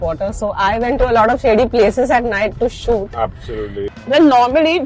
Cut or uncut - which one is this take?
cut